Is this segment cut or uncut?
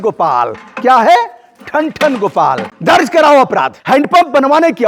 cut